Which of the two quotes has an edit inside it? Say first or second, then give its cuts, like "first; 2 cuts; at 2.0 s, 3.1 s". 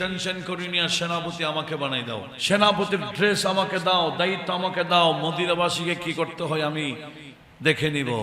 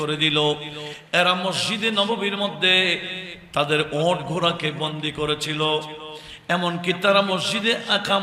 first; 1 cut; at 2.3 s